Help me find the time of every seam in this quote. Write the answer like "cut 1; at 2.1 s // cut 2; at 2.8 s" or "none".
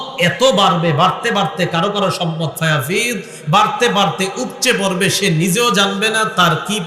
none